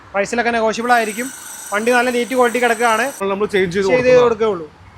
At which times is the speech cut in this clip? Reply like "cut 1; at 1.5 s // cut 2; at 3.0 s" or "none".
cut 1; at 3.2 s